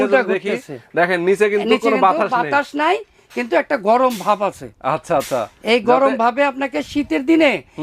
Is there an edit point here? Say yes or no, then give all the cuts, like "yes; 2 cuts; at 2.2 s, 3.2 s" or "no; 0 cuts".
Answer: no; 0 cuts